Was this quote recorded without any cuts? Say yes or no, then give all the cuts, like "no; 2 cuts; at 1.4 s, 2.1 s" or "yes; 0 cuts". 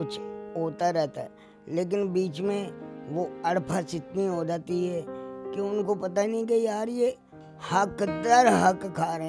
yes; 0 cuts